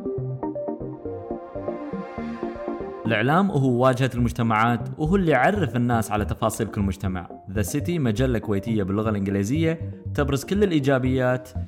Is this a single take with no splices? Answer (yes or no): no